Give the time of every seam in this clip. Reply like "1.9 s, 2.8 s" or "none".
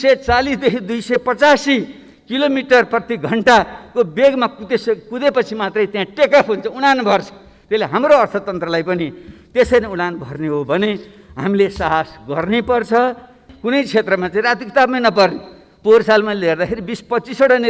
13.5 s